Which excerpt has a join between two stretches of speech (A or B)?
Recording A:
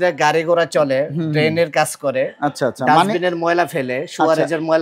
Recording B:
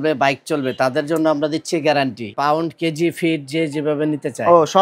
B